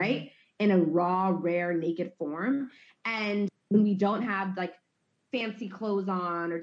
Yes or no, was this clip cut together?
yes